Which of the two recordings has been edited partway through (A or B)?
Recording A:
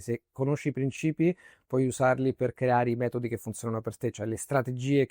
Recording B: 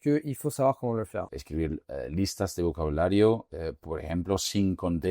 B